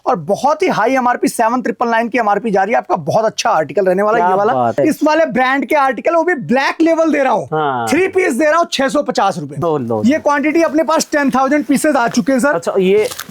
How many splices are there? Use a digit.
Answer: 2